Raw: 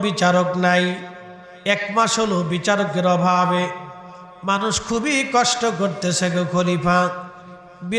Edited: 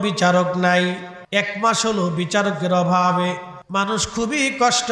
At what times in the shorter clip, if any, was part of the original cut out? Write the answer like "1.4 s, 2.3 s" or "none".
1.1 s, 3.5 s